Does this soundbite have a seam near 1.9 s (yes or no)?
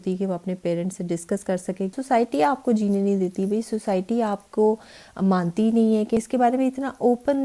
yes